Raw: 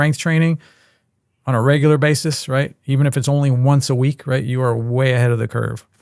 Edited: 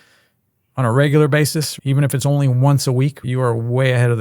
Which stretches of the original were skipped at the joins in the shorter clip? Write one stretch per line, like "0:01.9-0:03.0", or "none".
0:02.4-0:02.8
0:04.3-0:04.4